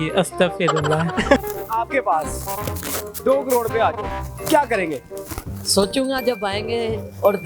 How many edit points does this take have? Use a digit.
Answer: 1